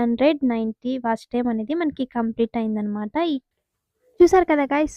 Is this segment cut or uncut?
cut